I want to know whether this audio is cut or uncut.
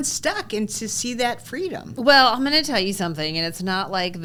uncut